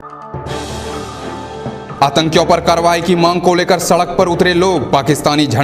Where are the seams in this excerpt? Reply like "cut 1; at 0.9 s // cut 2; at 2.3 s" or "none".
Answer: cut 1; at 1.9 s